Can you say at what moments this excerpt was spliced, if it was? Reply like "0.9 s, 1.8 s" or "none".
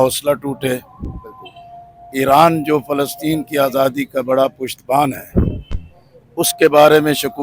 none

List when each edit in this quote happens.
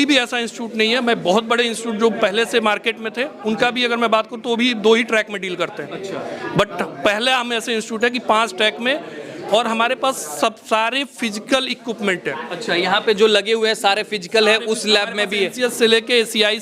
none

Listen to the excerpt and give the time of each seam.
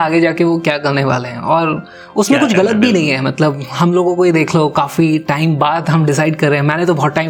none

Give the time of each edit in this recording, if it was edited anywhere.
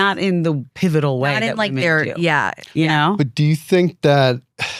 none

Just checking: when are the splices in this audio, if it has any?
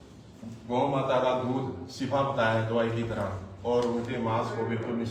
none

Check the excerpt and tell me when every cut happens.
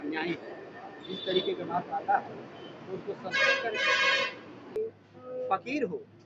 4.8 s

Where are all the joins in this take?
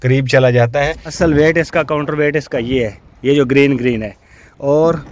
1.0 s

